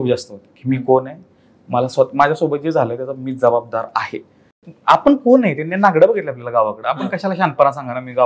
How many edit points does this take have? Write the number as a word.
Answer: one